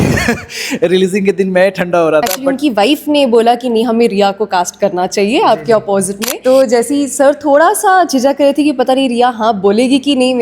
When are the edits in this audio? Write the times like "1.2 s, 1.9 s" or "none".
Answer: 2.4 s, 6.1 s